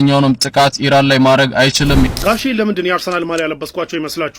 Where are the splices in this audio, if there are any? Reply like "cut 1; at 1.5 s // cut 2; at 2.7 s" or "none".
cut 1; at 2.1 s